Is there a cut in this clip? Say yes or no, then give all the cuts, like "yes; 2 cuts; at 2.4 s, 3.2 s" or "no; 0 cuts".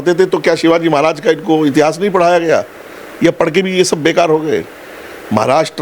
no; 0 cuts